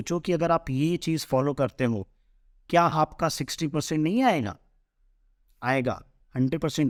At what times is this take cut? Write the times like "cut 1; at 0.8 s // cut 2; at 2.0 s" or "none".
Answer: none